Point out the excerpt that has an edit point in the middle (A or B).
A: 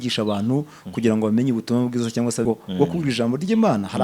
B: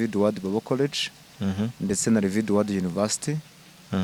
A